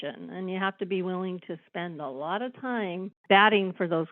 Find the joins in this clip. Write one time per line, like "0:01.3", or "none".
0:03.2